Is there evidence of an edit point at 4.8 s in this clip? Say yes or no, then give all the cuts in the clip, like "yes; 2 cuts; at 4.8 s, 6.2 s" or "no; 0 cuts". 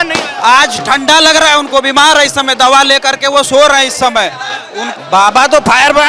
yes; 1 cut; at 4.8 s